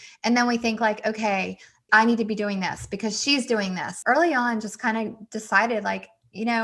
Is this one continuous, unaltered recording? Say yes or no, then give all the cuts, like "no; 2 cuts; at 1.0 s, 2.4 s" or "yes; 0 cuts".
no; 1 cut; at 3.9 s